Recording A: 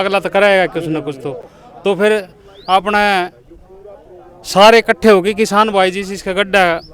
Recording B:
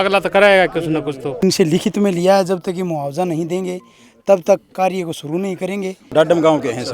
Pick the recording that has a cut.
B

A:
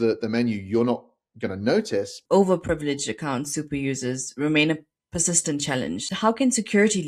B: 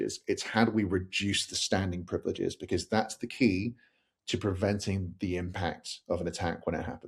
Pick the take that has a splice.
A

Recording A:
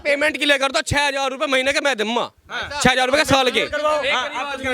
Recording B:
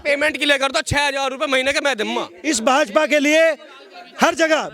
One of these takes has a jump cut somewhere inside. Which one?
B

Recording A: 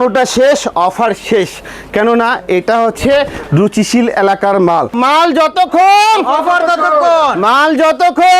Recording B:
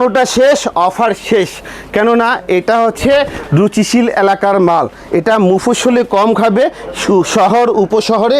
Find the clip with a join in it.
A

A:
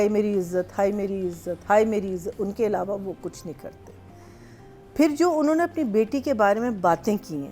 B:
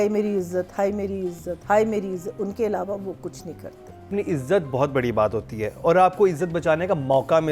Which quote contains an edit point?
B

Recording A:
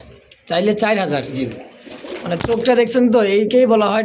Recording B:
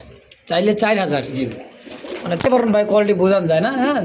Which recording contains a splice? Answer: B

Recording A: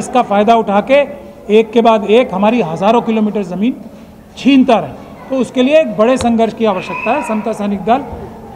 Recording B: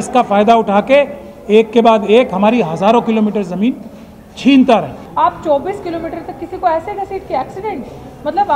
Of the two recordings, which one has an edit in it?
B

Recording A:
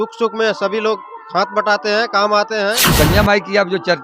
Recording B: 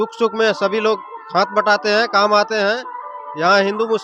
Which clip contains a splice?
A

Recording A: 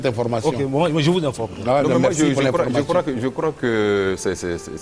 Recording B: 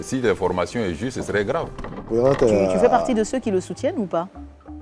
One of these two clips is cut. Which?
B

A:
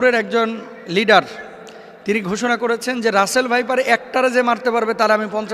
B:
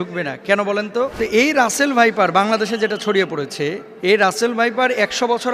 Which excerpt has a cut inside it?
B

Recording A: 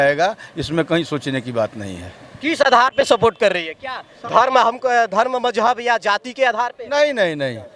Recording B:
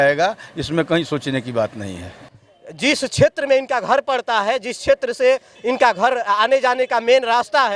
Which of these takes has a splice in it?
B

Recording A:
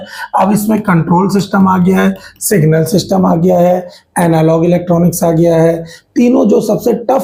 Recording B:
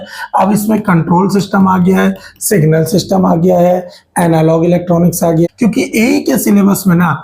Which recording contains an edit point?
B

